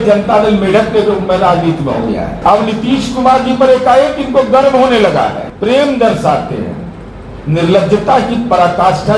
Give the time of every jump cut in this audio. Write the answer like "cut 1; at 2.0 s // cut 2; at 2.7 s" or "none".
cut 1; at 2.3 s // cut 2; at 5.5 s